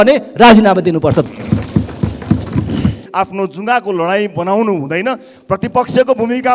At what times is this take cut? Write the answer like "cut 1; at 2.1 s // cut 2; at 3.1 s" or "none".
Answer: cut 1; at 1.2 s // cut 2; at 3.0 s

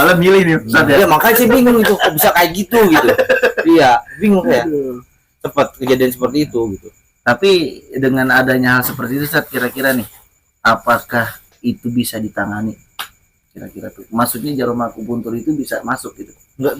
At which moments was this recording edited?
none

